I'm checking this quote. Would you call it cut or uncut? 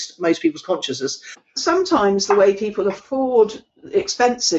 cut